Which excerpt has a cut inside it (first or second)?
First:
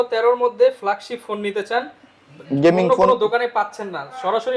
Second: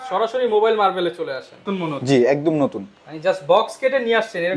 second